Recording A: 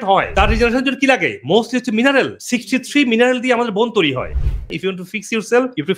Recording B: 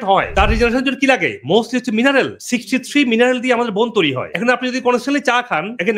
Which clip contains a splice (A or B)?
A